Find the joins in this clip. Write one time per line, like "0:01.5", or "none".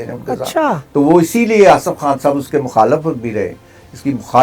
none